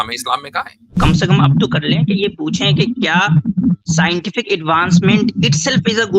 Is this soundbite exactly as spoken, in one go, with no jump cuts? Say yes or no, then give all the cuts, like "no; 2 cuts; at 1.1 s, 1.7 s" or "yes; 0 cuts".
no; 1 cut; at 1.0 s